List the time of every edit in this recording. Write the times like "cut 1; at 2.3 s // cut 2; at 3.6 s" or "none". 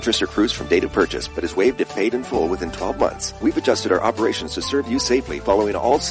cut 1; at 3.3 s